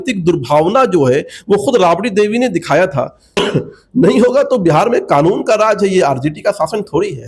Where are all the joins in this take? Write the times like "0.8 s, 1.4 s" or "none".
3.2 s